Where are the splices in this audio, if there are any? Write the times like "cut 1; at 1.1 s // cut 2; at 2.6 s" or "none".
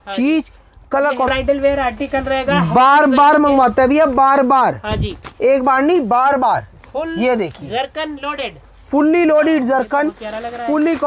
cut 1; at 1.3 s